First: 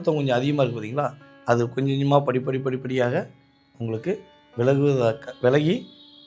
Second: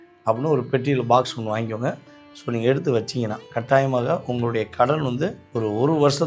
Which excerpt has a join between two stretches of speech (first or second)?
second